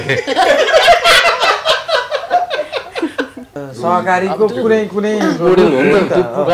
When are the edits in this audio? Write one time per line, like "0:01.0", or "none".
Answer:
0:03.6